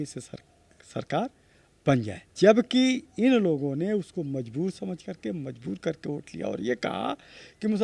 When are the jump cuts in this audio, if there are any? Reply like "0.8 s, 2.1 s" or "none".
2.2 s